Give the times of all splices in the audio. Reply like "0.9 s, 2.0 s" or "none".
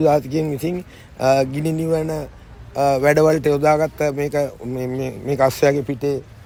none